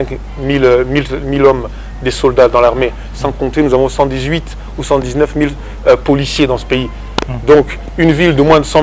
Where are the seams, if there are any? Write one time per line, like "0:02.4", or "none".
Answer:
none